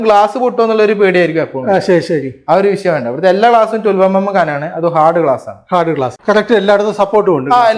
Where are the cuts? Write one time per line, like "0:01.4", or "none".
0:06.2